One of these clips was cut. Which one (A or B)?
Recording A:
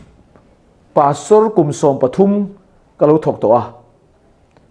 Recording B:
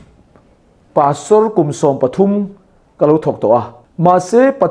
B